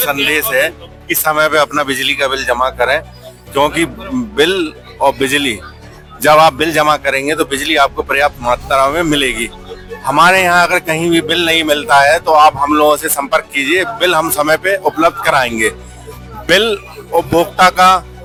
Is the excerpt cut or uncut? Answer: uncut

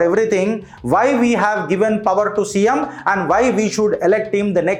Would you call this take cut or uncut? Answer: uncut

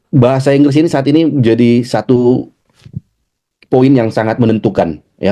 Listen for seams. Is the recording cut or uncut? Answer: uncut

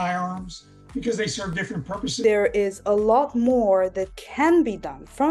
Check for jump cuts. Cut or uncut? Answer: cut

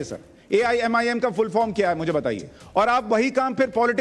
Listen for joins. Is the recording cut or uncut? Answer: cut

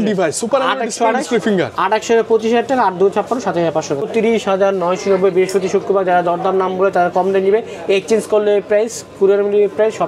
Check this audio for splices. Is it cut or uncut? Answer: cut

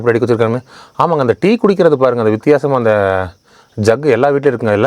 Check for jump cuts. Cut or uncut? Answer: uncut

